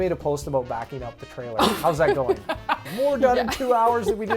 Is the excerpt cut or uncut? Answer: cut